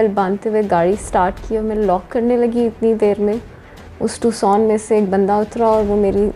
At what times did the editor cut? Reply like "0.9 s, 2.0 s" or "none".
none